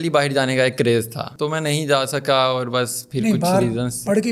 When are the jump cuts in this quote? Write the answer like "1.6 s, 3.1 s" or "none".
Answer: none